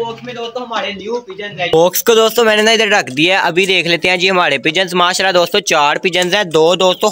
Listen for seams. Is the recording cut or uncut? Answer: cut